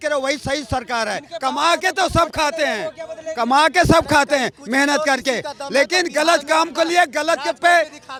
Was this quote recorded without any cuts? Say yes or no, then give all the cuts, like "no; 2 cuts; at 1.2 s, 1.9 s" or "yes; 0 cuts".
yes; 0 cuts